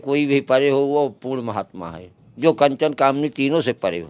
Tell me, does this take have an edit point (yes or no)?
no